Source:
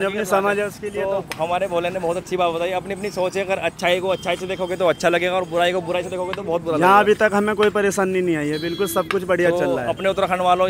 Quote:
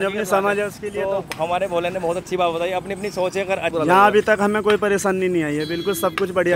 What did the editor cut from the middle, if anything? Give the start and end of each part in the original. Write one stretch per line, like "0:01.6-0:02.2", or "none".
0:03.7-0:06.6